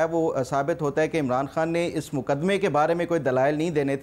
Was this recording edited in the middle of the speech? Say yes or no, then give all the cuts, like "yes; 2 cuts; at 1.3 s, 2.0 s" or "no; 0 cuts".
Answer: no; 0 cuts